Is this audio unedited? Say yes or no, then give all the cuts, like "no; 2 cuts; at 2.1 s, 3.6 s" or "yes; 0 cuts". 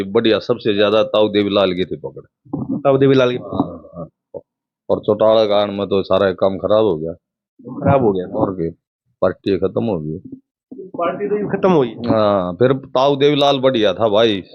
yes; 0 cuts